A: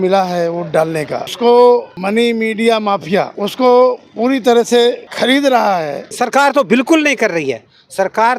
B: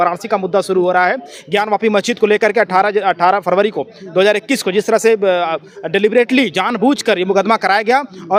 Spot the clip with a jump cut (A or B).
A